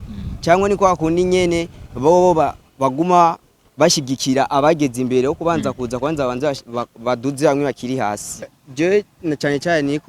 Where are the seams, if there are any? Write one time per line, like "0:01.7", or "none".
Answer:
0:08.6